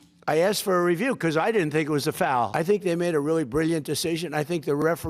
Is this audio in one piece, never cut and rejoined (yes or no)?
no